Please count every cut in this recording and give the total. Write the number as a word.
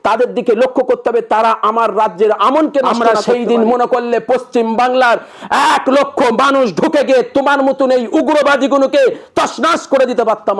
one